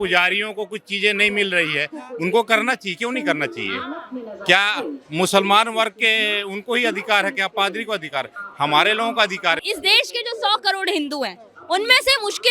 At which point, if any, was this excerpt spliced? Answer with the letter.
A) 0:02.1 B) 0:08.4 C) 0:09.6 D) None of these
C